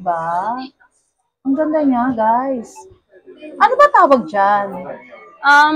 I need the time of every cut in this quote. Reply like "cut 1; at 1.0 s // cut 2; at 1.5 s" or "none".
none